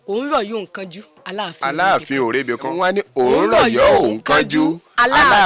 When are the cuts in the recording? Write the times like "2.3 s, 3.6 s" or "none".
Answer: 2.7 s